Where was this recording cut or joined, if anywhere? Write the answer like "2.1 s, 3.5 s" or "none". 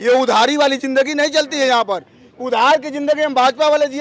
none